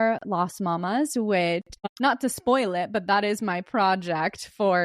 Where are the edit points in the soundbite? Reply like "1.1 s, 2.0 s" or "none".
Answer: 1.9 s